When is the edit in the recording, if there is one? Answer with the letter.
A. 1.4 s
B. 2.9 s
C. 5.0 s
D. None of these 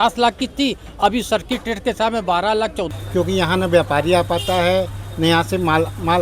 B